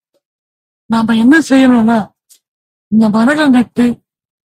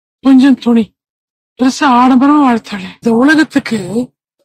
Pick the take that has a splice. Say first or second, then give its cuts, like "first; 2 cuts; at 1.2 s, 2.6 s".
second; 1 cut; at 3.0 s